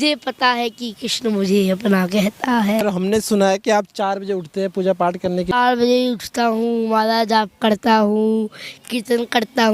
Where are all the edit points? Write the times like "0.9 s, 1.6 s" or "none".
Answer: 2.8 s, 5.5 s